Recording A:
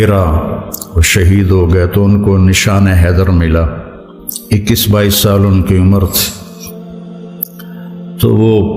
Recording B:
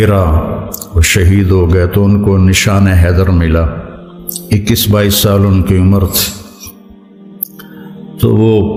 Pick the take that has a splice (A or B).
A